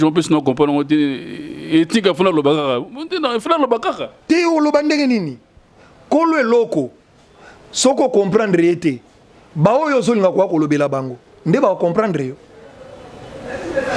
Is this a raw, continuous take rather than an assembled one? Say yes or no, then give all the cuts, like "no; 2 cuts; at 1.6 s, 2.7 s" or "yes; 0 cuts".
yes; 0 cuts